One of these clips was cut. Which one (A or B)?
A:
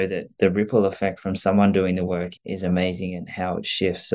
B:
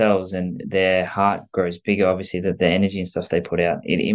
A